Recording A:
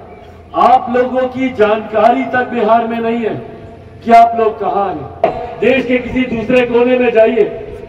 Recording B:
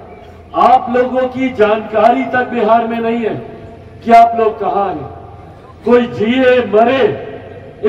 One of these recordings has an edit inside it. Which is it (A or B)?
A